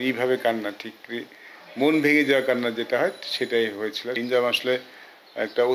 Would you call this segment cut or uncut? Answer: cut